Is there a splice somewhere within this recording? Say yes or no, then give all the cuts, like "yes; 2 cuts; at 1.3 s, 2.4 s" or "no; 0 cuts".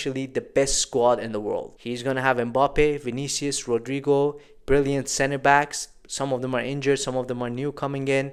no; 0 cuts